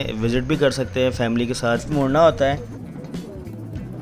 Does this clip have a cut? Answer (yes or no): yes